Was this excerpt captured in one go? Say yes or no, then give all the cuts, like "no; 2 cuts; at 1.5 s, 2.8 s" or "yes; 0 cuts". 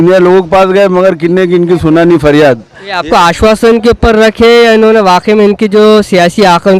yes; 0 cuts